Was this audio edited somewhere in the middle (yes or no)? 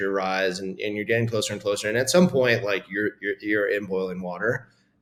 no